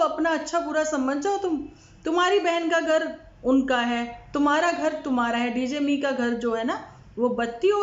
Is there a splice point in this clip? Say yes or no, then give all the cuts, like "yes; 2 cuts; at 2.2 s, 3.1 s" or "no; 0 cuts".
no; 0 cuts